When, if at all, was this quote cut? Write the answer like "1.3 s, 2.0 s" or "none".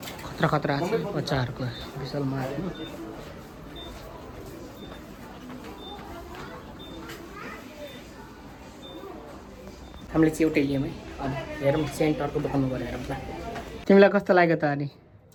none

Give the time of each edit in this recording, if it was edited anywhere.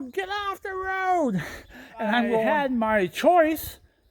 2.5 s

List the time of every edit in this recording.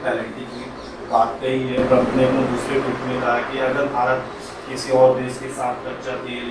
none

